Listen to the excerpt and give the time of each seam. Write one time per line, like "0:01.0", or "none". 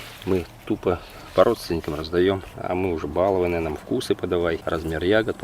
0:02.5
0:04.6